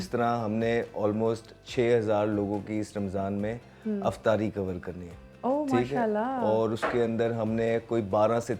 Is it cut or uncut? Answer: uncut